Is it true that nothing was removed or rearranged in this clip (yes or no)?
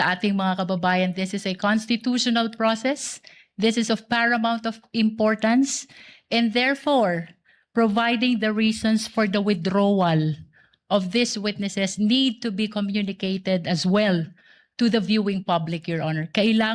yes